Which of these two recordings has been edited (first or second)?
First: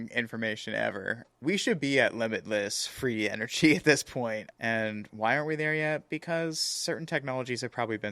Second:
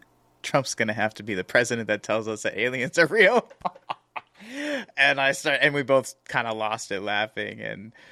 first